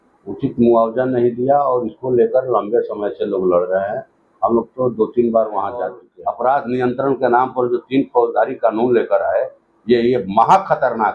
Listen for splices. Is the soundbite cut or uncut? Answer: cut